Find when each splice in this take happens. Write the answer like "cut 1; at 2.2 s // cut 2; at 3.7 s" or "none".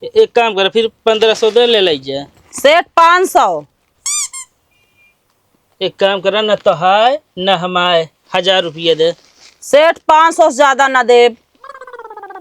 cut 1; at 11.4 s